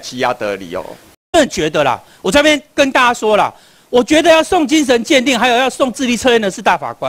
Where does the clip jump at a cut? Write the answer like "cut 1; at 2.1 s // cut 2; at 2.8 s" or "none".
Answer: cut 1; at 1.3 s